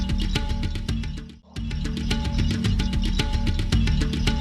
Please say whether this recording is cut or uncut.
uncut